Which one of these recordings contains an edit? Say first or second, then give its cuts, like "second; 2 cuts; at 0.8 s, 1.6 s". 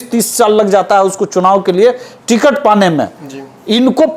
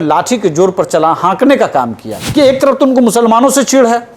second; 1 cut; at 2.2 s